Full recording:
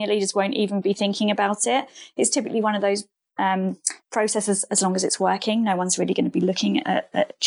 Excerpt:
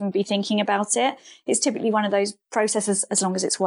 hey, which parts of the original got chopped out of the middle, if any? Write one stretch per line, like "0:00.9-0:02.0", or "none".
0:03.1-0:04.0

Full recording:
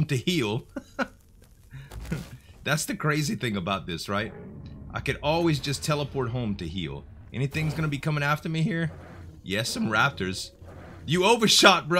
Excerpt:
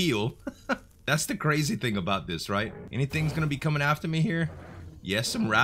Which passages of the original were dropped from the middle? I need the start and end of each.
0:01.2-0:02.5
0:04.4-0:07.2

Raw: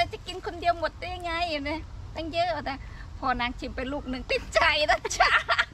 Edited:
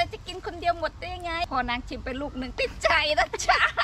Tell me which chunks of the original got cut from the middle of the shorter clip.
0:01.5-0:03.2

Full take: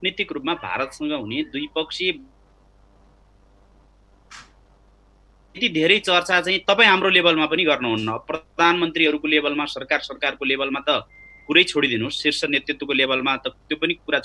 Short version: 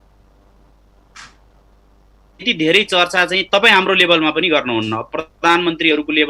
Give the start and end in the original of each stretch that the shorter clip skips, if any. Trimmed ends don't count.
none

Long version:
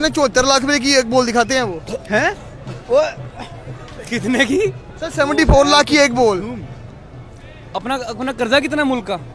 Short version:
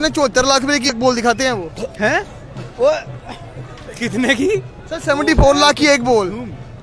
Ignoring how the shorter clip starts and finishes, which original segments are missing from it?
0:00.9-0:01.0

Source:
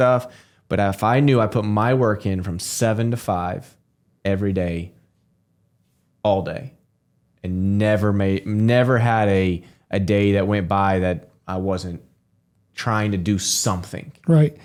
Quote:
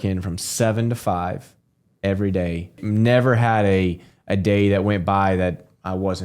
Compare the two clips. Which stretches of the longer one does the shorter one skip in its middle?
0:05.0-0:08.4

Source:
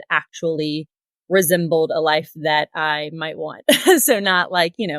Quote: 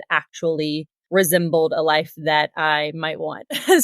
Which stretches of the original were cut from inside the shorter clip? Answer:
0:00.9-0:01.1

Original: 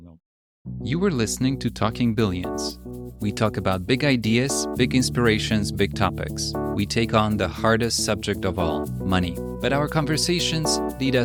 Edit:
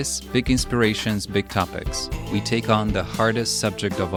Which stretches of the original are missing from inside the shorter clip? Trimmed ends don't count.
none

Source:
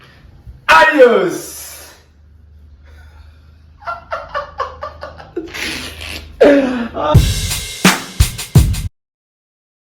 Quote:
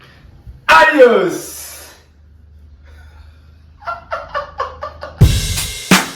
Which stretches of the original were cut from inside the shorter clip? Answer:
0:05.2-0:07.1

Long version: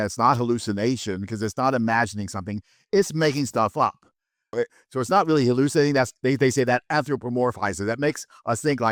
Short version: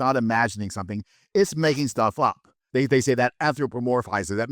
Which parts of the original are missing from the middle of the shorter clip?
0:04.2-0:06.1

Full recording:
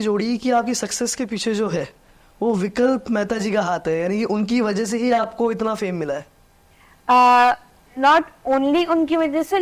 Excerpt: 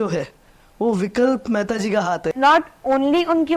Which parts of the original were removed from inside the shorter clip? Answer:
0:03.9-0:07.9

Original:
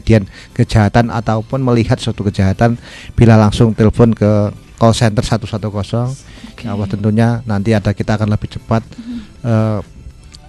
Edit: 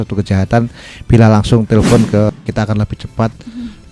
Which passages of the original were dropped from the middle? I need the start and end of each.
0:04.4-0:07.8

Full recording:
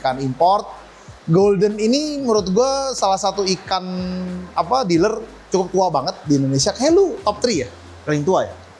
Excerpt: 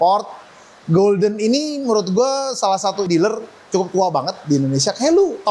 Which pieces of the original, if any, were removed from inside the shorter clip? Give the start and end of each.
0:03.5-0:04.9

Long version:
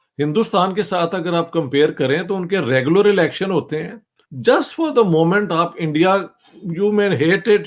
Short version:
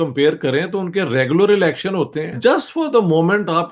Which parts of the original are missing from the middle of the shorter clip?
0:03.8-0:04.3

